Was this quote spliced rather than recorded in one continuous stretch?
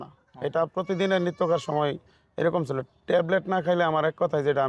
no; 0 cuts

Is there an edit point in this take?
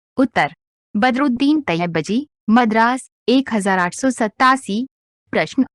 no; 0 cuts

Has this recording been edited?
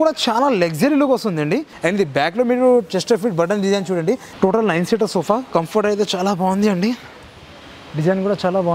yes; 2 cuts; at 1.7 s, 4.3 s

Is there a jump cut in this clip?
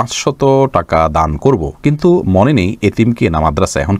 no; 0 cuts

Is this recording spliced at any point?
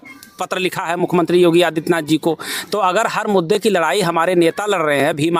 no; 0 cuts

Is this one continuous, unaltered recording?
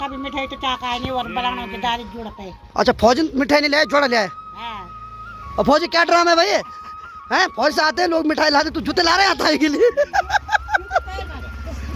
yes; 0 cuts

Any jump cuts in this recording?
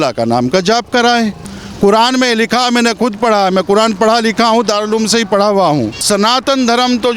yes; 2 cuts; at 1.5 s, 6.0 s

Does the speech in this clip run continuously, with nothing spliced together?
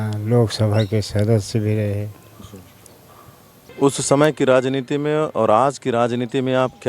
no; 1 cut; at 3.6 s

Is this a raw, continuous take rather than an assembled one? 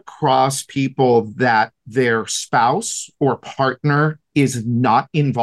yes; 0 cuts

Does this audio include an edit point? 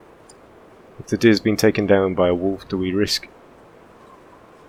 no; 0 cuts

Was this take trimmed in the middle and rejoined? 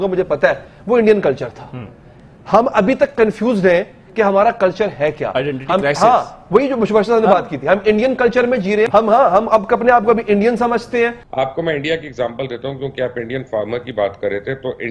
yes; 2 cuts; at 8.9 s, 11.2 s

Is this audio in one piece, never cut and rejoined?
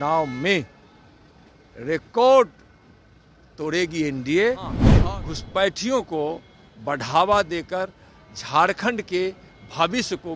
no; 1 cut; at 4.9 s

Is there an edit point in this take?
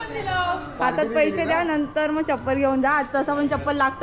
no; 0 cuts

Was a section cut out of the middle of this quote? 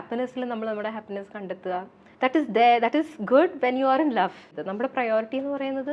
yes; 2 cuts; at 2.0 s, 4.6 s

